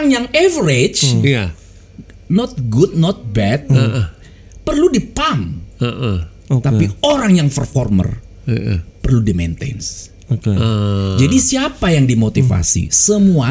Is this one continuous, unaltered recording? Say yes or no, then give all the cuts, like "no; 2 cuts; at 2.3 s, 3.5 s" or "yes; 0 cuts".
yes; 0 cuts